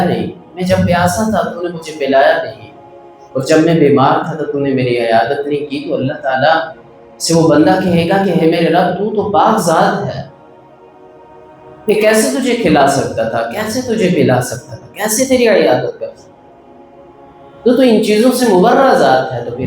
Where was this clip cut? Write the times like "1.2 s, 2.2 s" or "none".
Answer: 10.4 s, 11.9 s